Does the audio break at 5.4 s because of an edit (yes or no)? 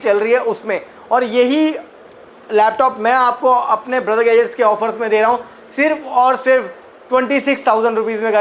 no